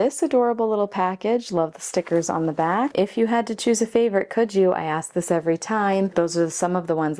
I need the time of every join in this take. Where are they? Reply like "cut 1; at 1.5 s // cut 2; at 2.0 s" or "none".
cut 1; at 2.9 s // cut 2; at 6.1 s